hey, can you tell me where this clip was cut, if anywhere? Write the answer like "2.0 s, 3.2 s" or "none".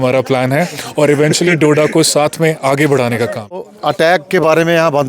3.8 s